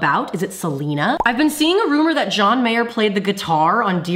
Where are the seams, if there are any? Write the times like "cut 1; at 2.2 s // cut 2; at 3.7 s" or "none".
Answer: cut 1; at 1.2 s